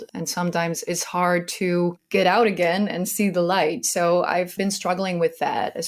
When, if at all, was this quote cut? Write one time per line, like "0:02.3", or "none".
none